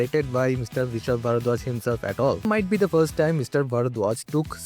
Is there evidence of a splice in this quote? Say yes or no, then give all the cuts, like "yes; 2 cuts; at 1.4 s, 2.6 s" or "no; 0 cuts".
yes; 1 cut; at 2.4 s